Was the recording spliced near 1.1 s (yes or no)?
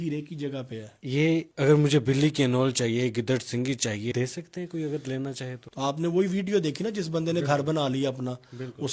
yes